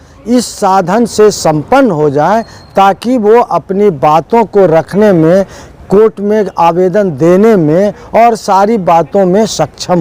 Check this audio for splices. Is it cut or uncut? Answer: uncut